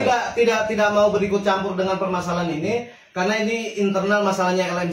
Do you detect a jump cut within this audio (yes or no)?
no